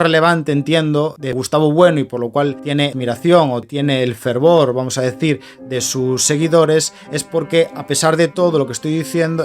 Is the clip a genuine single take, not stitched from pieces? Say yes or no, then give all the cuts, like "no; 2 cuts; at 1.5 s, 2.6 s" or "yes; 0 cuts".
no; 3 cuts; at 1.2 s, 2.8 s, 3.6 s